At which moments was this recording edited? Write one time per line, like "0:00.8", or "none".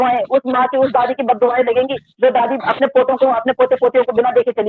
none